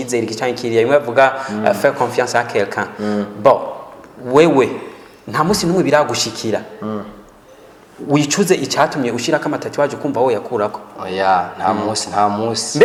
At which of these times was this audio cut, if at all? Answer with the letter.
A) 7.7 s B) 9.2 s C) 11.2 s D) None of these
D